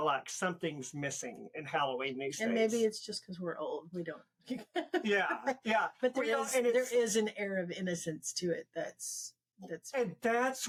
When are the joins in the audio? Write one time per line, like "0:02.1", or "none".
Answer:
none